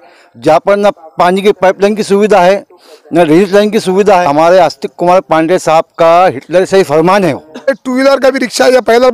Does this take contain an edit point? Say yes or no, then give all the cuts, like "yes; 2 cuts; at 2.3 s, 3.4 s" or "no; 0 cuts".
yes; 2 cuts; at 4.2 s, 7.7 s